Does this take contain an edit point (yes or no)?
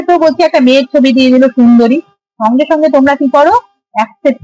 no